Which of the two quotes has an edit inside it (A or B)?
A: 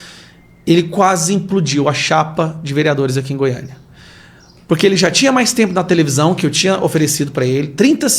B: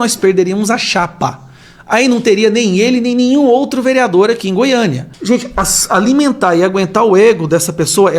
B